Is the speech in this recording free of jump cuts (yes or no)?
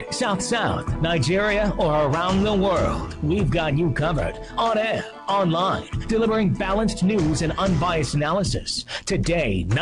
yes